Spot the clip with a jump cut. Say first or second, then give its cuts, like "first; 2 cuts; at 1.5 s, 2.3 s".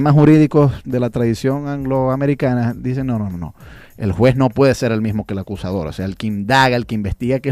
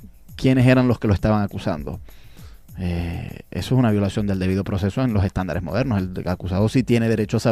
second; 1 cut; at 5.7 s